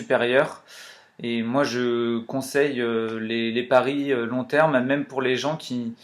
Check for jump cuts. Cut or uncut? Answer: uncut